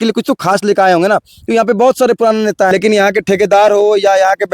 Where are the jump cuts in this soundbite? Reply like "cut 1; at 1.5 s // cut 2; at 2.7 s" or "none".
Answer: cut 1; at 2.7 s